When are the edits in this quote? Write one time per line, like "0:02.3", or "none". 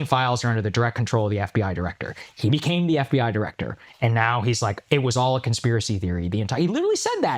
none